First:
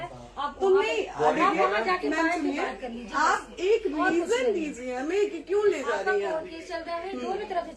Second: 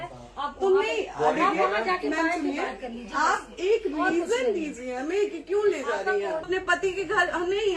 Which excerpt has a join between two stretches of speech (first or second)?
second